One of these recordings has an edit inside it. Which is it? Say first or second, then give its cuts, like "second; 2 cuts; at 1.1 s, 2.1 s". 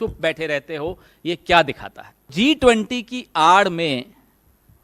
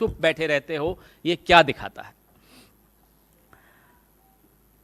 first; 1 cut; at 2.3 s